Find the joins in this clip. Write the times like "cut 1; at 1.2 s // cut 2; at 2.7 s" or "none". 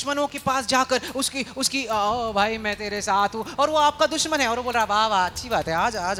none